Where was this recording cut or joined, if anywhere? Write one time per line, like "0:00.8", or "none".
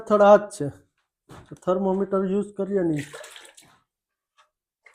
none